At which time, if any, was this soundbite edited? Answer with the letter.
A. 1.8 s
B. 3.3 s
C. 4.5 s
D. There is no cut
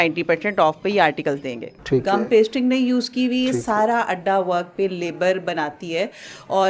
A